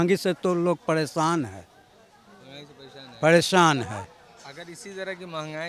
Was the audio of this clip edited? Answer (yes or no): no